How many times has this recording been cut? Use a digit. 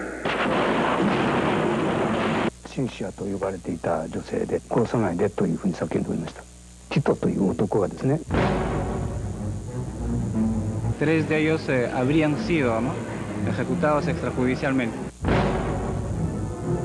1